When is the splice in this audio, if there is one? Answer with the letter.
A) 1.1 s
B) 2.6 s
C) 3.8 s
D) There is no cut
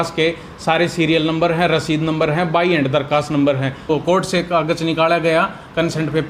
C